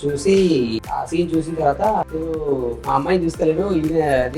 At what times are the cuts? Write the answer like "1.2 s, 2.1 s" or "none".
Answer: 0.9 s, 2.1 s